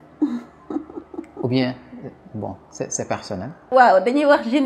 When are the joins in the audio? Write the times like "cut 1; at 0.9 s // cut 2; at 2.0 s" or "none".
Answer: cut 1; at 3.6 s